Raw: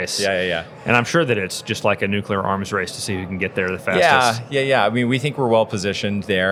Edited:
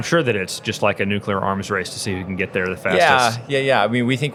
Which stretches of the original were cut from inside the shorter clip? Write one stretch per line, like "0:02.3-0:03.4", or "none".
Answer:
none